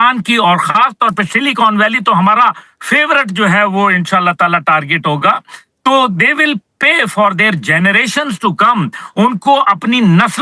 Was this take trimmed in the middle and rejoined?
no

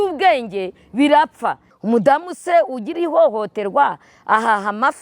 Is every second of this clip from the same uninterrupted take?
no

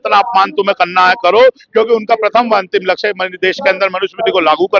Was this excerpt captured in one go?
yes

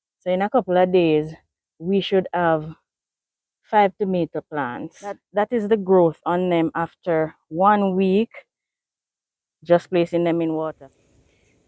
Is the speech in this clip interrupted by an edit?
yes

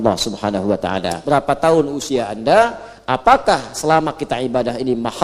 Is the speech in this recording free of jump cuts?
no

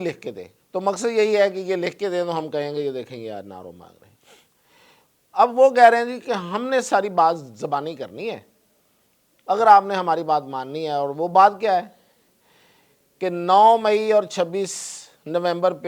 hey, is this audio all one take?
yes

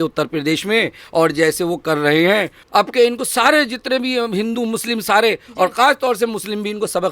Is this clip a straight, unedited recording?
no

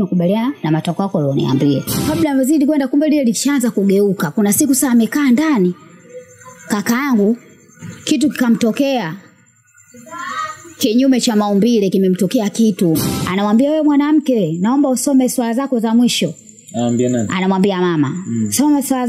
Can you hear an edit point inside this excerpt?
yes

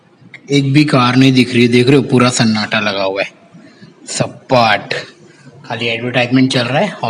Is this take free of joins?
yes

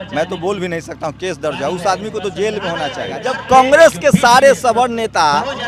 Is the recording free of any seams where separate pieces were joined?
no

